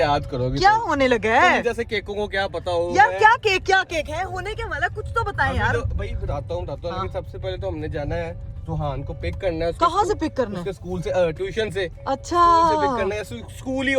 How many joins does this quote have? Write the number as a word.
zero